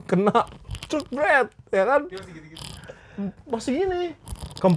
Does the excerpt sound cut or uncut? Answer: uncut